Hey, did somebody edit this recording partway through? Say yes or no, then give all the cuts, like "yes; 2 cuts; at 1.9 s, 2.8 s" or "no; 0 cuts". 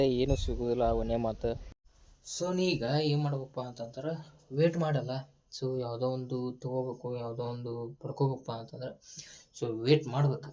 yes; 1 cut; at 1.7 s